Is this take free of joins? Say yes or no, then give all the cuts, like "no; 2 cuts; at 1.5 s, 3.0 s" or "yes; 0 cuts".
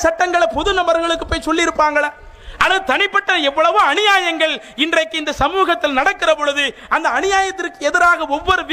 yes; 0 cuts